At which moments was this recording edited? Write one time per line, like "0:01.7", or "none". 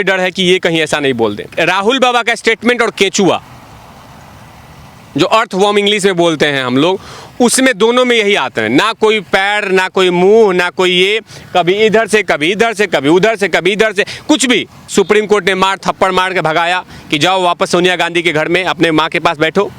0:01.5
0:14.9